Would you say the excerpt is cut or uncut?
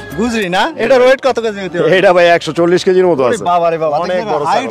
uncut